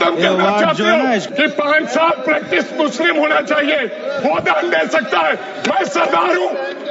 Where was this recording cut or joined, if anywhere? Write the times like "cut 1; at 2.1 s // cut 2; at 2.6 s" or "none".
cut 1; at 1.3 s